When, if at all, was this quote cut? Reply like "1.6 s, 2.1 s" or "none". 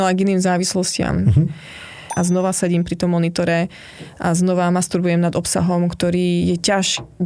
2.0 s